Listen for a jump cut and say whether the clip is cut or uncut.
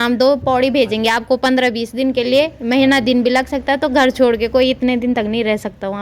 uncut